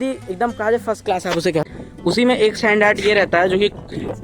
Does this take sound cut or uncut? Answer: cut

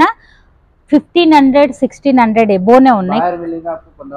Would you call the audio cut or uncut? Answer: uncut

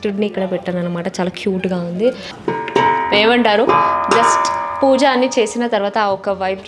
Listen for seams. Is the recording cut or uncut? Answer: cut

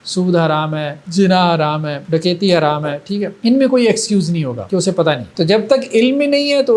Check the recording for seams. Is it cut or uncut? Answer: cut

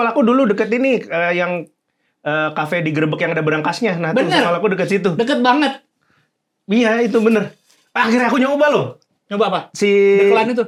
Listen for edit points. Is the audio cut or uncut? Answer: uncut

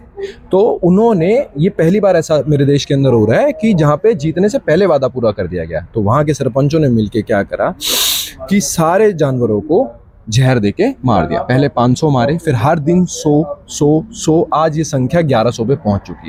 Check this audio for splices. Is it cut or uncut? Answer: uncut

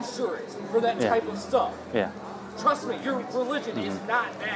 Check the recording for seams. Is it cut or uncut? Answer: uncut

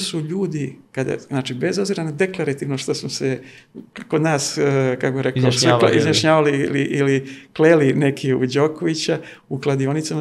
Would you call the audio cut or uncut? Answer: uncut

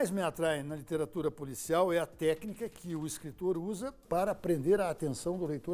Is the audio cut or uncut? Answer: cut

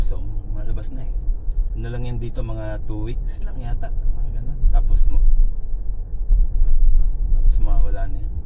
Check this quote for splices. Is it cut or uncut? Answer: uncut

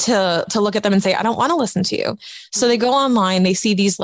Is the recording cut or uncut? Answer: uncut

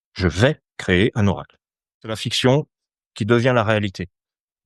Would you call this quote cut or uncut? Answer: cut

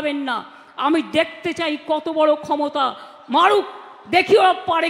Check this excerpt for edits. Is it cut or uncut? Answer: uncut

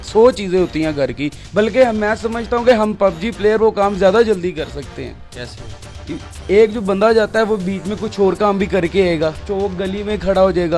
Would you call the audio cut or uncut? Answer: uncut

